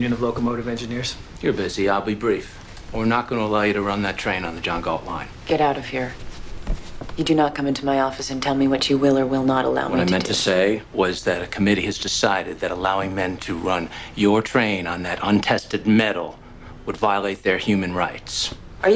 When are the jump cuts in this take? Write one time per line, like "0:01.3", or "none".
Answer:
0:17.9